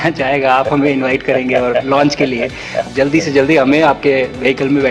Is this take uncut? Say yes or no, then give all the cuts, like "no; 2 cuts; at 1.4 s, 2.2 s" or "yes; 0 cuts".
no; 1 cut; at 2.9 s